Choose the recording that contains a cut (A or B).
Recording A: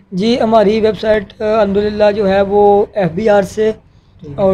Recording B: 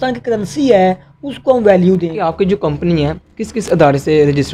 B